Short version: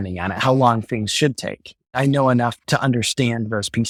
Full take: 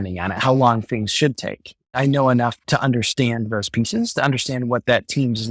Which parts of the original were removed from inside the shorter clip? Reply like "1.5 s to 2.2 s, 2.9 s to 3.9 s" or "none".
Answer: none

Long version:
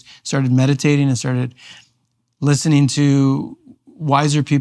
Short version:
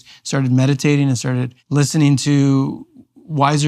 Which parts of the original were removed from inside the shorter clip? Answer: 1.6 s to 2.3 s

